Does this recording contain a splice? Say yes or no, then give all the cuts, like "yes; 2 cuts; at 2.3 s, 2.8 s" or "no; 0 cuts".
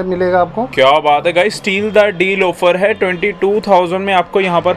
no; 0 cuts